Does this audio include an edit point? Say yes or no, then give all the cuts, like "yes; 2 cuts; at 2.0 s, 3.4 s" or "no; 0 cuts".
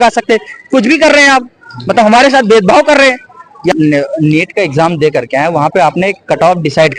yes; 1 cut; at 3.7 s